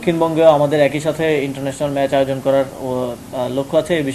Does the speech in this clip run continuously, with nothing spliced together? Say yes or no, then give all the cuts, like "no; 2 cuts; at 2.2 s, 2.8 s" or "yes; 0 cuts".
yes; 0 cuts